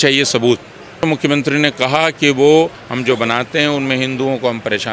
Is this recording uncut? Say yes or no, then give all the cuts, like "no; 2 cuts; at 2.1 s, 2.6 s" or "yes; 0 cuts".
no; 2 cuts; at 1.0 s, 2.9 s